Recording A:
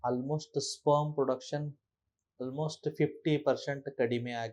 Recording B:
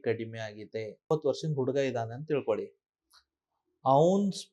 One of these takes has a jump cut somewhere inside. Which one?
B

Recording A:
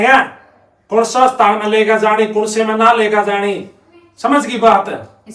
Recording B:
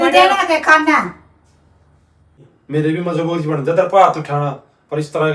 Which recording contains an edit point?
B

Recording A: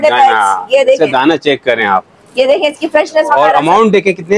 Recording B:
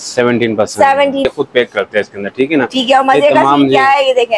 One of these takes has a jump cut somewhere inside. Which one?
B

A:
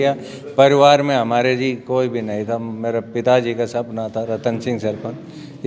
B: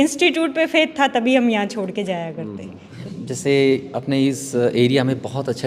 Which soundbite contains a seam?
B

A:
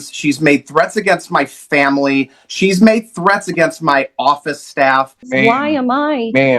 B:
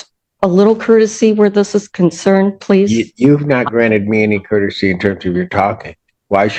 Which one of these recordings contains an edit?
A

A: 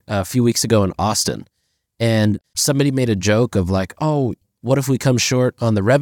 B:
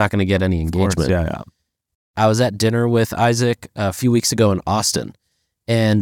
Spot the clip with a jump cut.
B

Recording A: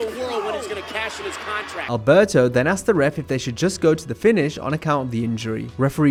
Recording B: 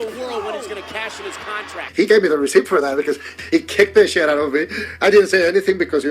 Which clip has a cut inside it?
B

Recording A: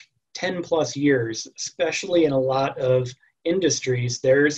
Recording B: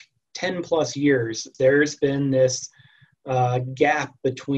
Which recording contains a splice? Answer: B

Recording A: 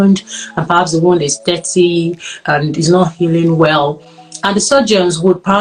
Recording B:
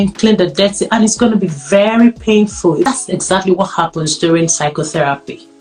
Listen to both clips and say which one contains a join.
B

